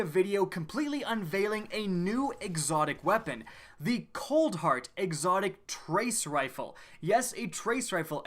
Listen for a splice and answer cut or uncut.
cut